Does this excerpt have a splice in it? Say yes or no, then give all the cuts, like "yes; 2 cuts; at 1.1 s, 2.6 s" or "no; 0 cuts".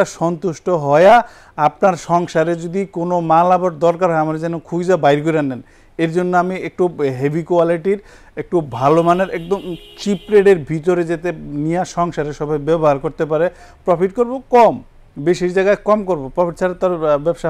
no; 0 cuts